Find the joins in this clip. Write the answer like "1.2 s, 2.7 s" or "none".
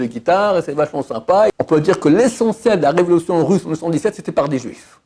1.5 s